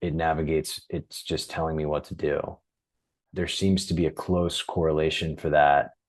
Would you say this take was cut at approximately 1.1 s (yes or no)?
no